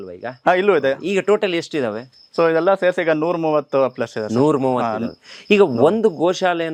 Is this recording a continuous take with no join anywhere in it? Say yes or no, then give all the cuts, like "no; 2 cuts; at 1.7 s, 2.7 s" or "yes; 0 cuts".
yes; 0 cuts